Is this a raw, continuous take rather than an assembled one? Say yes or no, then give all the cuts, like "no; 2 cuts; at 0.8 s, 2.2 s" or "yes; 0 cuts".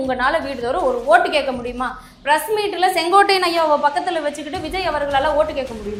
yes; 0 cuts